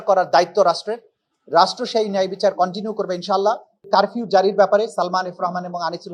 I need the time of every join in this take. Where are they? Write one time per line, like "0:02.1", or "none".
0:03.7